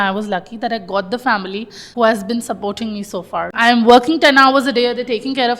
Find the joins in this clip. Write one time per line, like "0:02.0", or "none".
0:01.8
0:03.5